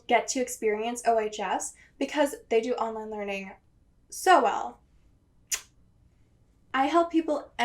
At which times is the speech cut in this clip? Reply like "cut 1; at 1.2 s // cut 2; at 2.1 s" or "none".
cut 1; at 6.6 s